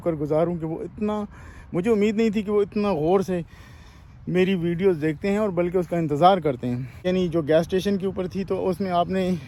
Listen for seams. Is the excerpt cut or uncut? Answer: cut